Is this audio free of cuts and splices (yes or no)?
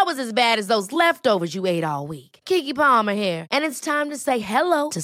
yes